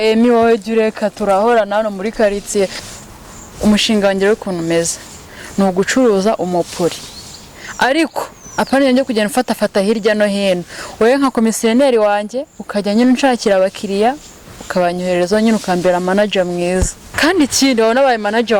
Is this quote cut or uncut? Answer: cut